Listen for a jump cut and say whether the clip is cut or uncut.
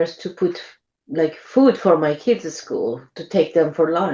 uncut